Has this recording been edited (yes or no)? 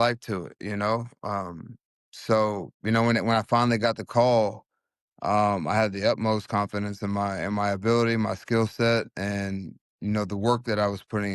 no